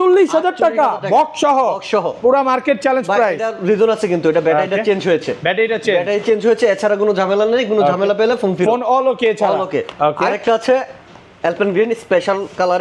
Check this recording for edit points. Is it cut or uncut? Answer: uncut